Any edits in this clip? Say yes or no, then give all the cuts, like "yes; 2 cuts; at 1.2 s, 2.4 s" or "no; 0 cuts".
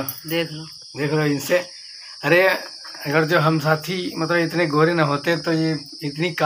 no; 0 cuts